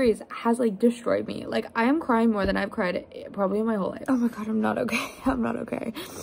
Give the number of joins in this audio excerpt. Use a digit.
1